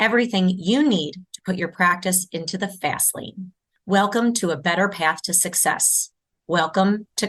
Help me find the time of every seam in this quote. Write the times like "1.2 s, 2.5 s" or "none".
none